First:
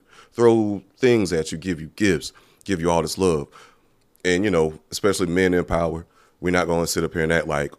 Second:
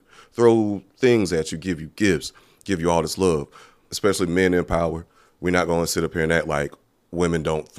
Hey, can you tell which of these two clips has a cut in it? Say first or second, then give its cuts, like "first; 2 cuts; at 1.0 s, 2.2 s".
second; 1 cut; at 3.9 s